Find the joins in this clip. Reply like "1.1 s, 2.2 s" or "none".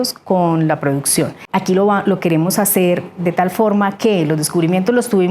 1.4 s

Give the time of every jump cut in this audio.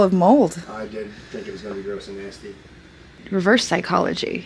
3.2 s

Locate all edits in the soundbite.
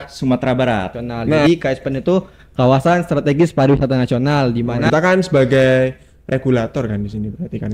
1.4 s, 4.8 s

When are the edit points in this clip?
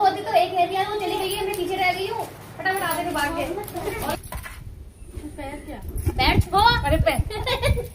4.2 s

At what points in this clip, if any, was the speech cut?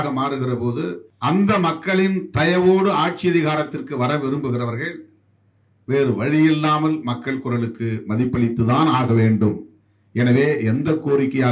1.1 s

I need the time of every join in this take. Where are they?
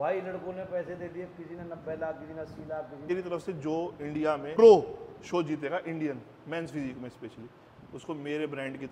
3.1 s, 4.5 s

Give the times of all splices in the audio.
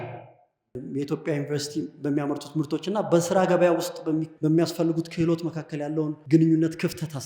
0.8 s, 4.3 s, 6.2 s

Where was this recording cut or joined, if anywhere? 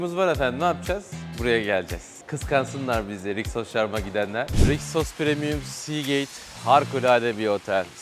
2.1 s, 4.5 s

